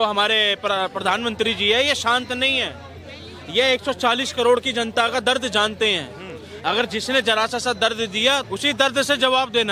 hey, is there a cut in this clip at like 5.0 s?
no; 1 cut; at 8.4 s

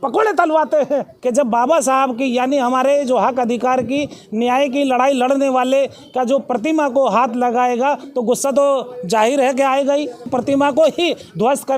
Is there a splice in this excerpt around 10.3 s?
yes; 2 cuts; at 1.1 s, 10.3 s

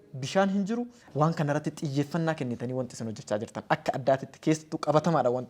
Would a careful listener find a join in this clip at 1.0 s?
yes; 1 cut; at 1.0 s

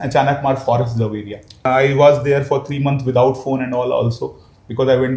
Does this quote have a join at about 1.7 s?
yes; 1 cut; at 1.7 s

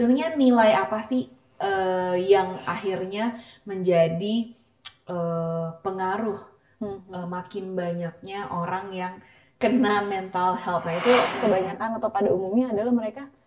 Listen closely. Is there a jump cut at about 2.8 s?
no; 1 cut; at 11.3 s

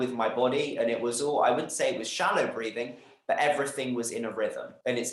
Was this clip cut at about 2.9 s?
no; 0 cuts

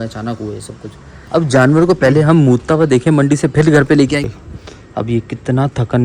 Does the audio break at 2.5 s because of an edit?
no; 2 cuts; at 1.1 s, 4.3 s

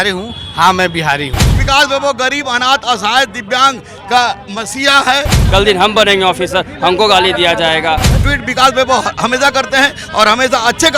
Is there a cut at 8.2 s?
yes; 3 cuts; at 1.6 s, 5.4 s, 8.2 s

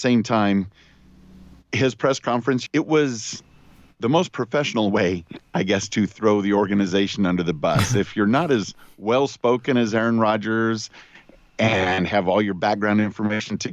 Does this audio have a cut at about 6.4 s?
no; 1 cut; at 2.7 s

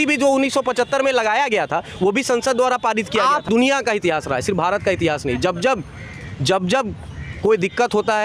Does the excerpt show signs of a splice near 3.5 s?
yes; 1 cut; at 3.5 s

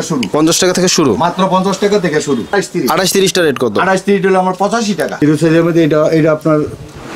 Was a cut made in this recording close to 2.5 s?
yes; 2 cuts; at 2.5 s, 5.1 s

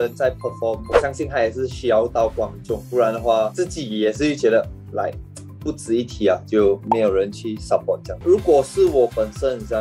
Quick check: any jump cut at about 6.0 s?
no; 1 cut; at 8.2 s

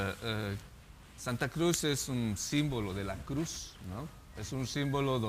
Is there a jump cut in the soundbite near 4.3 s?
yes; 1 cut; at 4.3 s

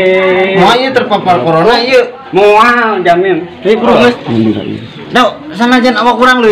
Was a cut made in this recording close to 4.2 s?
yes; 2 cuts; at 2.3 s, 4.2 s

